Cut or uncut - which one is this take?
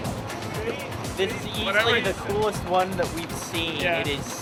uncut